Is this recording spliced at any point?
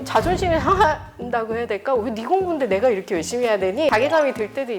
yes; 1 cut; at 3.9 s

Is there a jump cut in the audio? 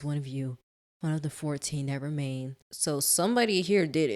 yes; 1 cut; at 2.6 s

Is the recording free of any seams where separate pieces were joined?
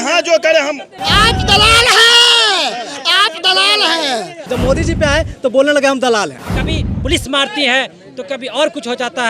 no; 3 cuts; at 0.9 s, 4.5 s, 6.4 s

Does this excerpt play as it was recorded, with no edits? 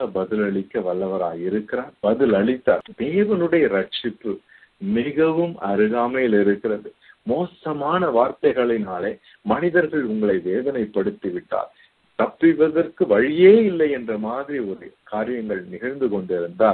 no; 2 cuts; at 1.9 s, 2.9 s

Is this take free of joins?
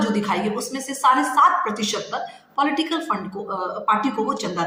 yes; 0 cuts

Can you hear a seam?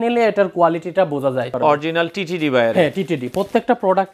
yes; 1 cut; at 1.5 s

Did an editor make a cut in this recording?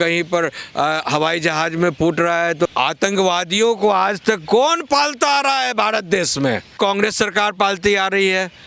yes; 2 cuts; at 2.7 s, 6.7 s

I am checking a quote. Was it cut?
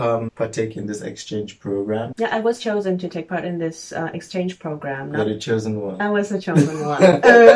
no; 0 cuts

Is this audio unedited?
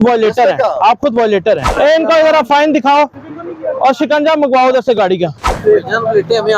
no; 2 cuts; at 1.7 s, 5.5 s

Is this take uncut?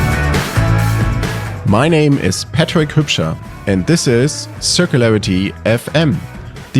no; 1 cut; at 0.9 s

